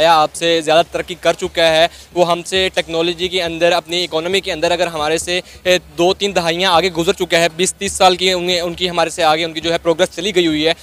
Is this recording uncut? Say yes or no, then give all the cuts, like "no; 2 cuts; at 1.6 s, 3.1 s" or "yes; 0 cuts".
yes; 0 cuts